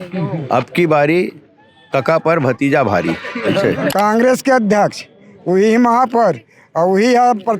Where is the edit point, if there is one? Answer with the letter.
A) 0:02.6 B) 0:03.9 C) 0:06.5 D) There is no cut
B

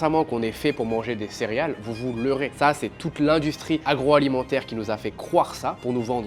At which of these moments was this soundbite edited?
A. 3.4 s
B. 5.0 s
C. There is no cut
C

